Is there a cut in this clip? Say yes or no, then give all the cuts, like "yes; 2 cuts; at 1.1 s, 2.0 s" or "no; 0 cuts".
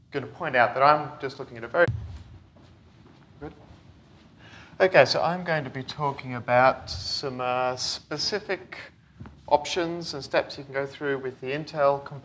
no; 0 cuts